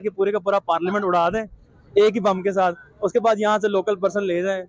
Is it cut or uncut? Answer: uncut